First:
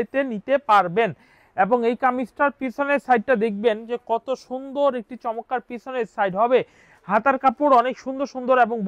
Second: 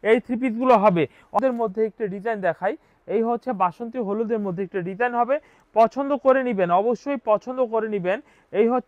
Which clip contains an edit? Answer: second; 1 cut; at 1.4 s

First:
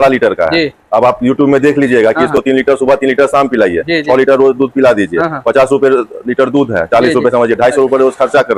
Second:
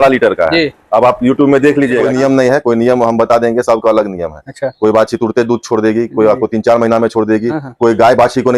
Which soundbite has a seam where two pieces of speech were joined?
second; 1 cut; at 2.1 s

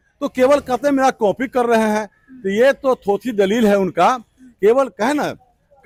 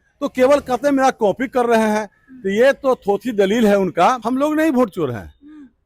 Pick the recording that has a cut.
second; 1 cut; at 4.2 s

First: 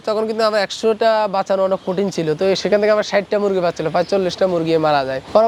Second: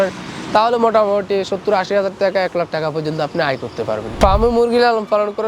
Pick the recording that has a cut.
second; 1 cut; at 4.1 s

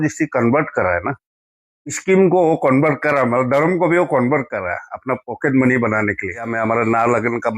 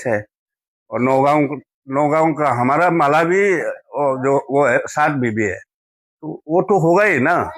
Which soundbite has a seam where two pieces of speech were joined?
first; 1 cut; at 6.5 s

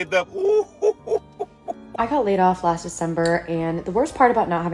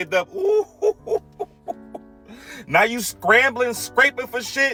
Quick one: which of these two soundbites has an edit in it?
first; 1 cut; at 1.9 s

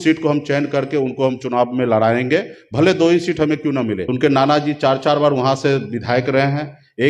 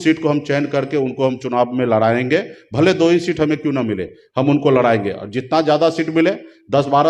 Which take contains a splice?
first; 1 cut; at 4.0 s

